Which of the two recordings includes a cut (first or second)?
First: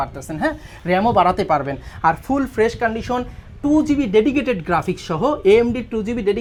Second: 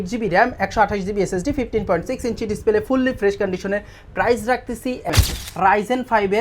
second